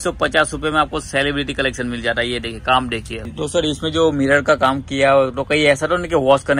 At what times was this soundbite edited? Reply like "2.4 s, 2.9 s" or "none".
3.2 s